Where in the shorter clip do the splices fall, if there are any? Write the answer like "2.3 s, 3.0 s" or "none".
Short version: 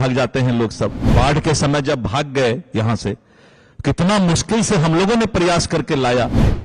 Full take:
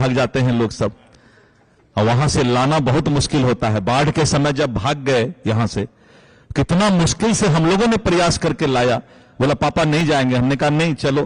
1.1 s